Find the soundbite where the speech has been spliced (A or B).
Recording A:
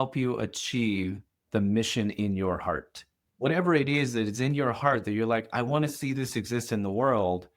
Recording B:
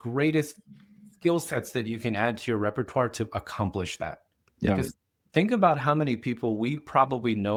A